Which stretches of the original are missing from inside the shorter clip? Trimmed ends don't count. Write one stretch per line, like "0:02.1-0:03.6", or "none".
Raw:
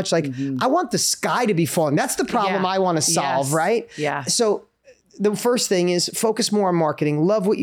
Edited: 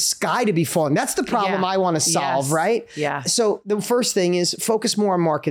0:04.6-0:05.2